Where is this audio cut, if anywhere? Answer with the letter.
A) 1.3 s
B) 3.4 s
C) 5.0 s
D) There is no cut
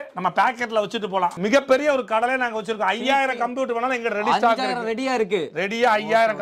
A